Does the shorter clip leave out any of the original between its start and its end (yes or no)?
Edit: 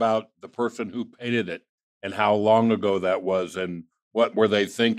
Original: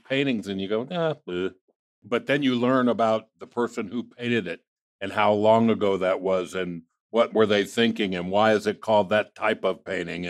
no